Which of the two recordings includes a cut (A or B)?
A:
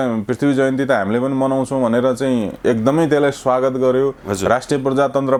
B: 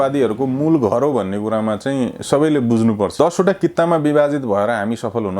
B